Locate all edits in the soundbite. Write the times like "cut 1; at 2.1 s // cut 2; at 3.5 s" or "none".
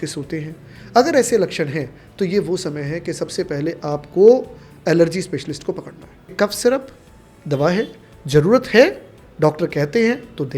cut 1; at 6.3 s